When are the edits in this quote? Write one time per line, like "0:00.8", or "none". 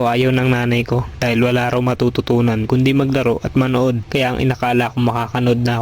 0:04.0